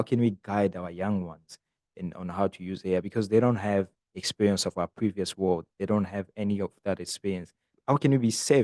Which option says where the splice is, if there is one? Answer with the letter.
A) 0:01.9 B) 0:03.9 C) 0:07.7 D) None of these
C